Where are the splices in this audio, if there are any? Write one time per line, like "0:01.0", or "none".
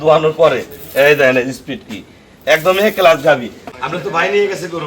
0:03.6